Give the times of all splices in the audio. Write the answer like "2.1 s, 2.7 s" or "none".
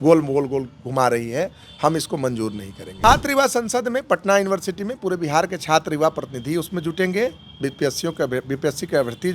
2.9 s